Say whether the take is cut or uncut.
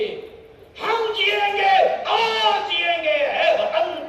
uncut